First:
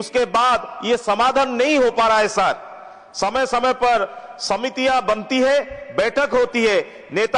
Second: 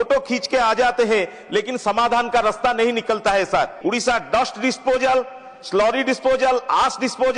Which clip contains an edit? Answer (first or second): second